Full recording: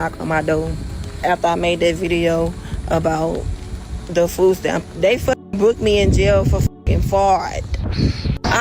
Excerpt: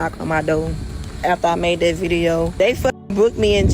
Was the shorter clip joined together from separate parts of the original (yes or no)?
yes